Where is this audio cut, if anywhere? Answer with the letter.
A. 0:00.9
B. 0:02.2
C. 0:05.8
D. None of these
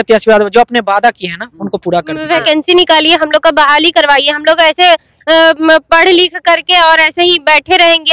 B